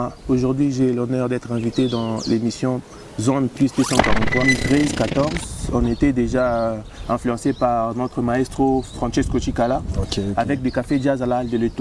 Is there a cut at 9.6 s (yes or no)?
no